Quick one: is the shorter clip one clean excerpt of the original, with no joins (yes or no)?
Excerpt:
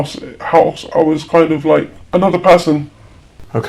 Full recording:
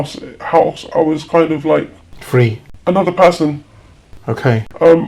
no